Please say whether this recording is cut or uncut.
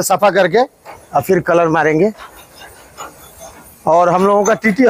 uncut